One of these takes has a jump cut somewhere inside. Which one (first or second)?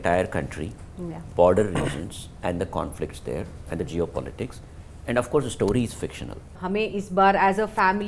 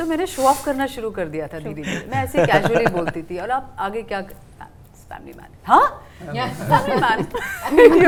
first